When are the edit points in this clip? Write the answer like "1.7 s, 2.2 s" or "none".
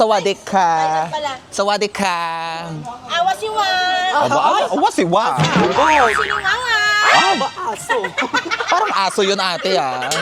none